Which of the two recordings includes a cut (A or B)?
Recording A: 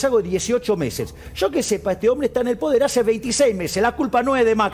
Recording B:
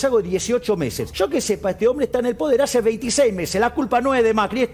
B